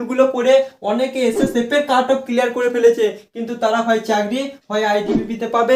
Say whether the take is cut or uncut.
uncut